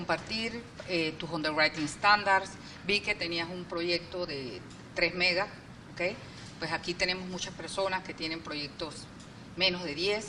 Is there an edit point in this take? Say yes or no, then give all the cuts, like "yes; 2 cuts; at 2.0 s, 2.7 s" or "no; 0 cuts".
no; 0 cuts